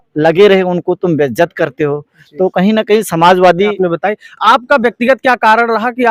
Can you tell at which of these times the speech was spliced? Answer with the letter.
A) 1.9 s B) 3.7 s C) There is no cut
B